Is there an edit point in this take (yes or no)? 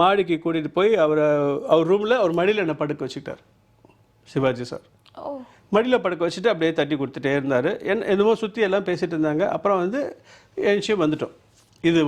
no